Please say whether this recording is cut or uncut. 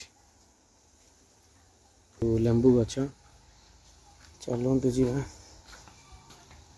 cut